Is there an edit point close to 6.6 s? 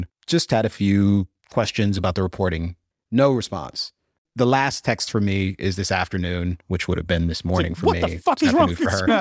no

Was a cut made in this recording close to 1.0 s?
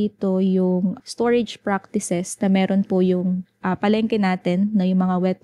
yes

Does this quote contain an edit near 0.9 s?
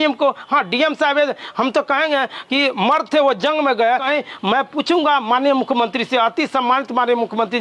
no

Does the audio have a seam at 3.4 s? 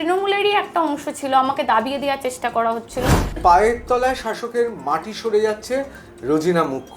yes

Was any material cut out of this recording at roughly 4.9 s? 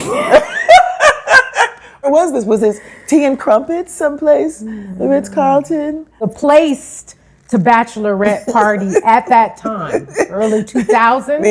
no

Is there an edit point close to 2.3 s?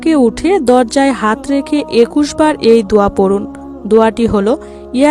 yes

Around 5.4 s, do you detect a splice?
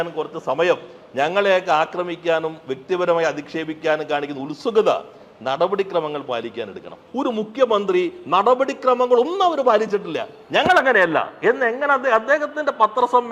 no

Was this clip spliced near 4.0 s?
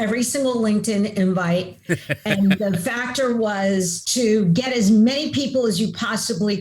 yes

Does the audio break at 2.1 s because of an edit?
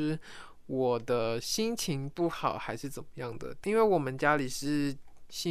no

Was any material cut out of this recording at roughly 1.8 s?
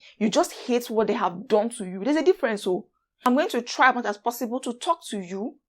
no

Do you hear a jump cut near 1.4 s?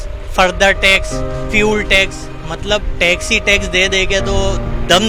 no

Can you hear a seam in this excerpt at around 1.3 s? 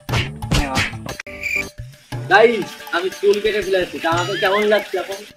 yes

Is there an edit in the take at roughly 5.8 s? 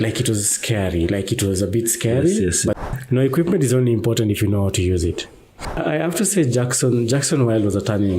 yes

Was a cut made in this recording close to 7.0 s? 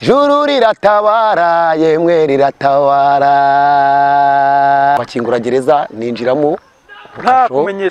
no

